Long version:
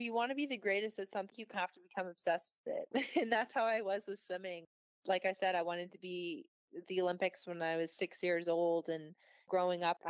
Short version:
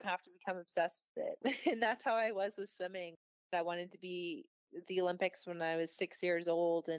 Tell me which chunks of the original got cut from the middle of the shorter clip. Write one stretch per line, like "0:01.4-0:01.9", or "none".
0:05.0-0:05.5